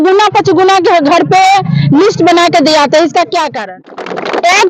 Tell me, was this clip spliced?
yes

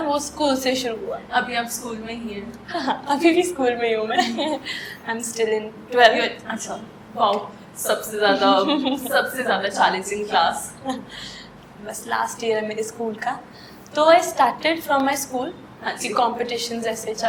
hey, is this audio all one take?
yes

